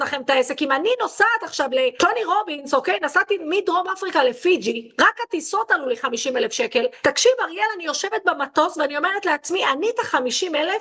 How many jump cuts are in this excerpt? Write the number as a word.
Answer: two